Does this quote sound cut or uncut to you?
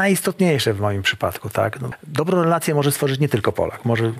cut